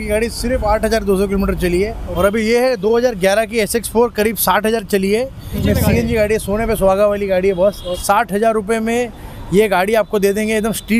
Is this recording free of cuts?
no; 3 cuts; at 2.0 s, 5.6 s, 7.9 s

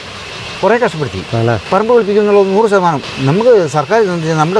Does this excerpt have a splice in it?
yes; 2 cuts; at 1.7 s, 3.1 s

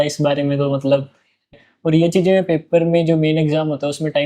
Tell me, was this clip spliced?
yes; 1 cut; at 1.5 s

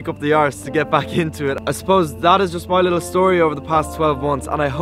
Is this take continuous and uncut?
yes; 0 cuts

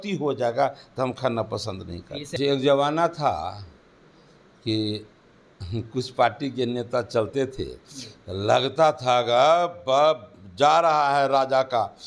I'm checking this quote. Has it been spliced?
yes; 1 cut; at 2.3 s

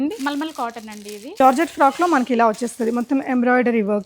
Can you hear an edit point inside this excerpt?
yes; 1 cut; at 1.4 s

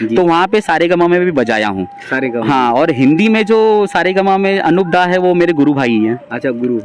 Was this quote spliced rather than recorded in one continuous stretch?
no; 0 cuts

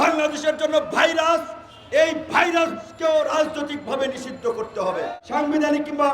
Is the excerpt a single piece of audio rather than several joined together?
no; 1 cut; at 5.1 s

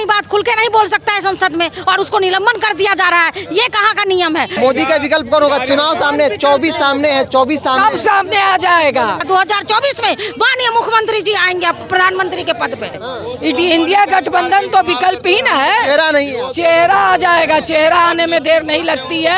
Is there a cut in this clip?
yes; 3 cuts; at 4.5 s, 9.2 s, 13.0 s

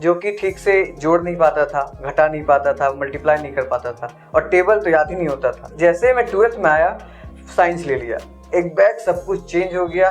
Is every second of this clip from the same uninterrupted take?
no; 1 cut; at 5.7 s

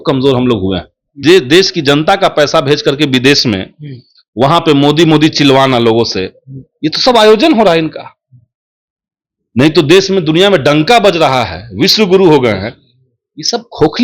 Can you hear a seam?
yes; 1 cut; at 1.2 s

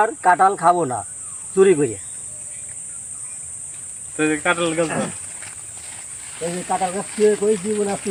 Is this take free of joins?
yes; 0 cuts

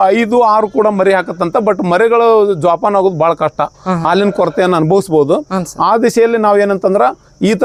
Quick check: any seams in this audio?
no; 0 cuts

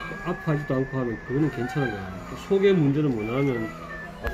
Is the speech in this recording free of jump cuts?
yes; 0 cuts

